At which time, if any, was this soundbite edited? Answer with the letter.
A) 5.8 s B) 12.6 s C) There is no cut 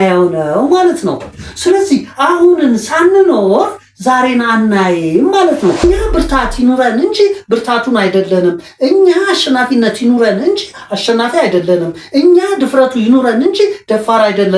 A